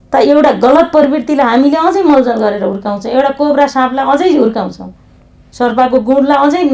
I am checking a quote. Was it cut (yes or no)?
no